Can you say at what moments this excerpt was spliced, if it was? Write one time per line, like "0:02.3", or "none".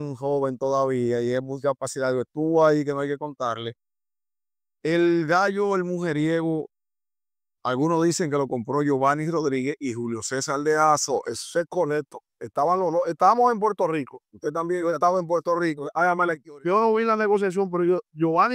none